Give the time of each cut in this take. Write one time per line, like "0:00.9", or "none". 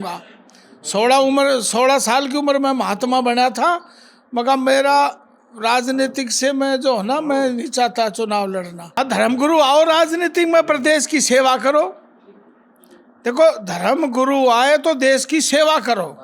0:08.8